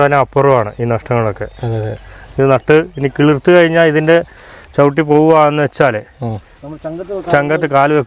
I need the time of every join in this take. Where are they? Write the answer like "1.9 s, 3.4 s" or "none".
none